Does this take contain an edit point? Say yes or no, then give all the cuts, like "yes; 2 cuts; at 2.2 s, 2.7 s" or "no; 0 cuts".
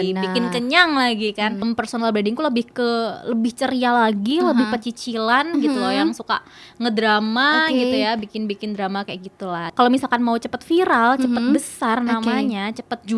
yes; 2 cuts; at 1.6 s, 9.7 s